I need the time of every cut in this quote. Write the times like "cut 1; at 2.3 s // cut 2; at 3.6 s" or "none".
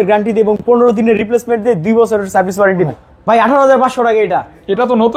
cut 1; at 3.0 s